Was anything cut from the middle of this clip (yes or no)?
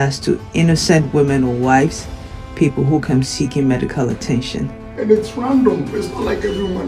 yes